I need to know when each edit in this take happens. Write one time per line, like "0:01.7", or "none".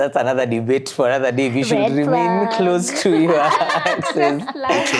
none